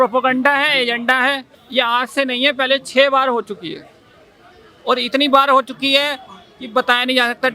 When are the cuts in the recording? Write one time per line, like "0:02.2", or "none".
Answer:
0:01.5